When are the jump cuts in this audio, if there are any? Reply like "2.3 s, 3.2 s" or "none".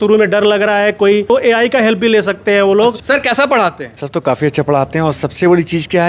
1.3 s, 3.0 s